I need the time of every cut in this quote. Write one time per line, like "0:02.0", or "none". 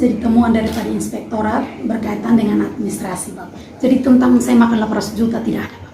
0:03.6

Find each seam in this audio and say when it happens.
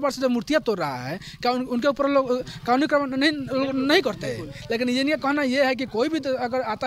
none

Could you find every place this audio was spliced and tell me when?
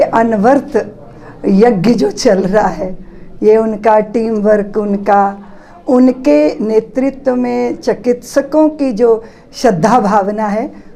none

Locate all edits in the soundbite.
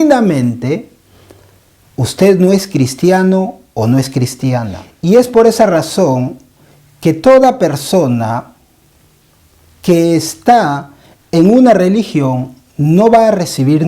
0:04.8

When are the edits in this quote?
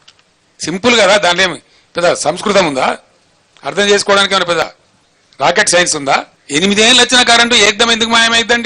0:06.4

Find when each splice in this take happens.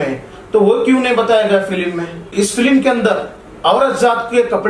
0:02.3

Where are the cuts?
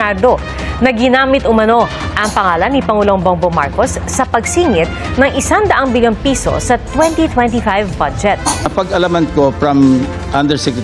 0:08.7

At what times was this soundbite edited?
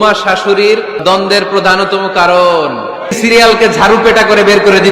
0:01.0
0:03.2

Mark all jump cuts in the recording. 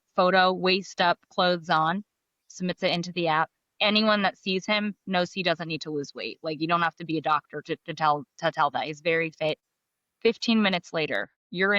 0:09.7

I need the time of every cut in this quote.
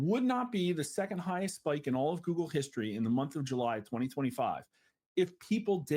none

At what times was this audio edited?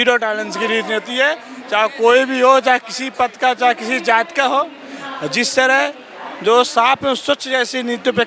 none

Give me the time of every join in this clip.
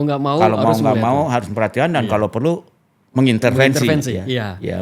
none

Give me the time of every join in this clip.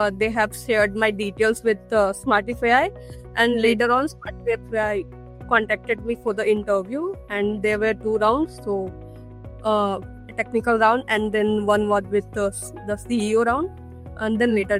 none

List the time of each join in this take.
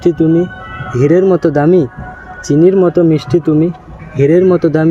none

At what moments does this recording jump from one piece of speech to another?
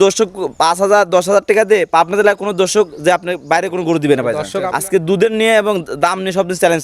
0:04.5

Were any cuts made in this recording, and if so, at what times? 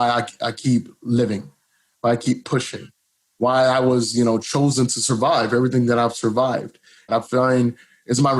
0:07.1

